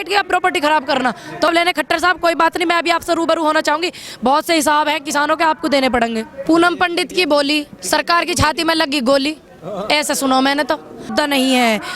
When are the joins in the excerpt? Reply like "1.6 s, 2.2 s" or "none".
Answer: 1.5 s, 6.3 s, 11.1 s

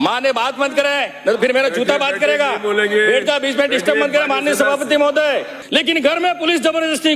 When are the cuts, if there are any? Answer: 5.6 s

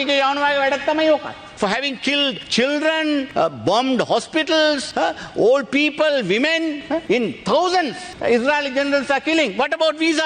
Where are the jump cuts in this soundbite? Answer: 1.4 s, 2.4 s, 3.3 s, 4.9 s, 6.9 s, 8.1 s

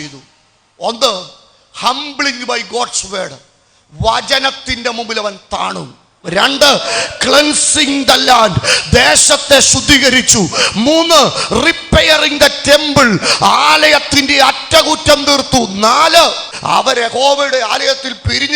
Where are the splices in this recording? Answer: 6.2 s, 16.5 s

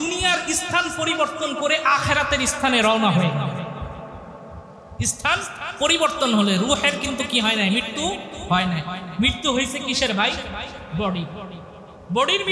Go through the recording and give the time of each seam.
none

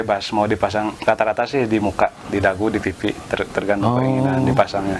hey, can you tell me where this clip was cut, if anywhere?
none

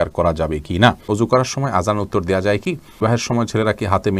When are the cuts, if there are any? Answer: 1.0 s, 3.0 s

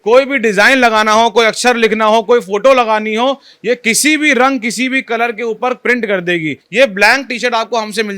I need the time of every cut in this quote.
6.6 s

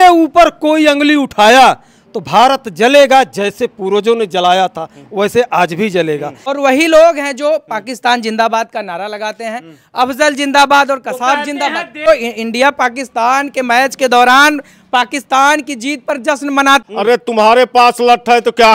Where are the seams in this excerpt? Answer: 6.4 s, 12.1 s, 16.8 s

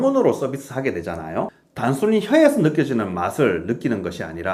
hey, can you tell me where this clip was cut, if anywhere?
1.5 s

